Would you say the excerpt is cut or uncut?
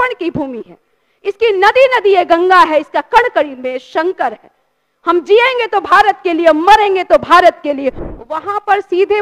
cut